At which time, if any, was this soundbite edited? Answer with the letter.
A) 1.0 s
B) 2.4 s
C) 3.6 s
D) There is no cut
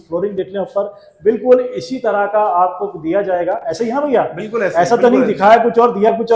D